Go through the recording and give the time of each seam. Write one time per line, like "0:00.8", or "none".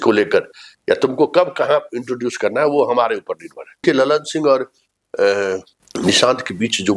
0:03.8
0:05.8